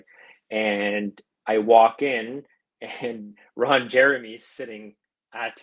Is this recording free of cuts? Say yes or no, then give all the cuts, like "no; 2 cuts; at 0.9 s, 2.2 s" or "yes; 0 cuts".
yes; 0 cuts